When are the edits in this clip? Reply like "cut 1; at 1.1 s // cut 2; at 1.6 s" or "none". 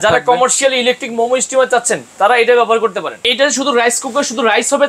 cut 1; at 3.3 s